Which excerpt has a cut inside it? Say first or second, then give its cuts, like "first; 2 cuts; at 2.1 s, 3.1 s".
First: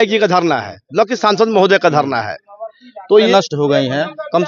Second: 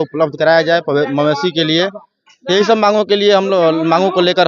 first; 1 cut; at 3.3 s